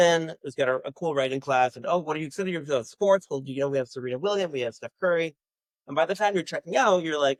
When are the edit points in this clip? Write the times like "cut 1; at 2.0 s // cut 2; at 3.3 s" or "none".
none